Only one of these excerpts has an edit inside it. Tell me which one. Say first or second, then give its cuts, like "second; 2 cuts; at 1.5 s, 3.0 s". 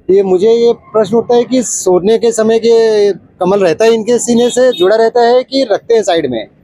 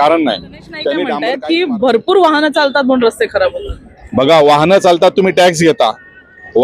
second; 1 cut; at 1.2 s